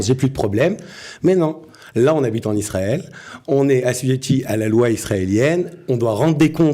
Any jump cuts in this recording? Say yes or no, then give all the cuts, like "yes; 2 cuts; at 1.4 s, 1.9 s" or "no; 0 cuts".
no; 0 cuts